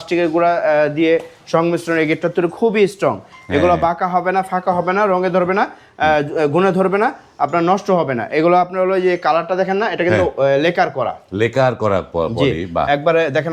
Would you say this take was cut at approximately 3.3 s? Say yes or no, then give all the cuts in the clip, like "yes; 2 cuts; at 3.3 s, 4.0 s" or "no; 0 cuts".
no; 0 cuts